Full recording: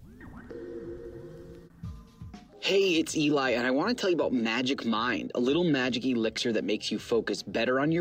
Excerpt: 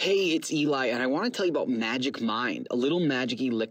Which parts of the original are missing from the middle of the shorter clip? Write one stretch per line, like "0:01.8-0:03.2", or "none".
none